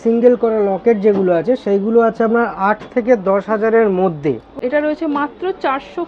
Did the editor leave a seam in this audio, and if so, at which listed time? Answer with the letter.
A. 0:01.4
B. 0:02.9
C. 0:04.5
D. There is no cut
C